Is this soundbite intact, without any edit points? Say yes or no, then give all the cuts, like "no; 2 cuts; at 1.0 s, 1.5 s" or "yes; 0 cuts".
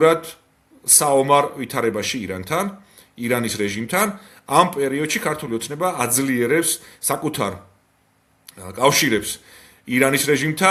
yes; 0 cuts